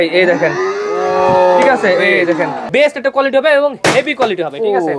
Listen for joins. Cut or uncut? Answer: cut